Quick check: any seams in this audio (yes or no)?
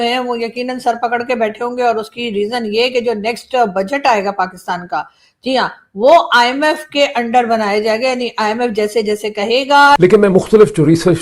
yes